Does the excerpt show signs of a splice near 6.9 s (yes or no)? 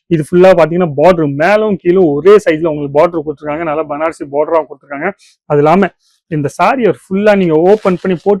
no